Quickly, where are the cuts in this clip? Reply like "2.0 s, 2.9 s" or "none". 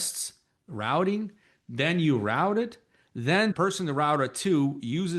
3.5 s

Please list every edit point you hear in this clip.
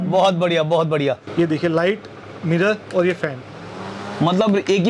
1.2 s

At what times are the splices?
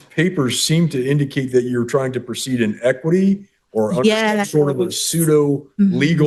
none

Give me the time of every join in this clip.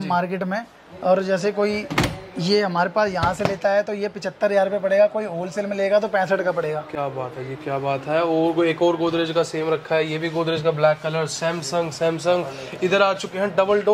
none

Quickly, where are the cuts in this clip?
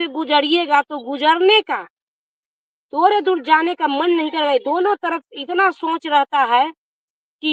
none

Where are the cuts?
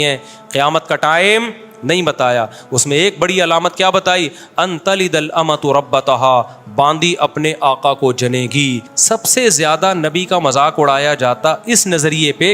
8.9 s

